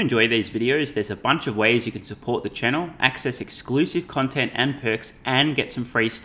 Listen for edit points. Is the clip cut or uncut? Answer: uncut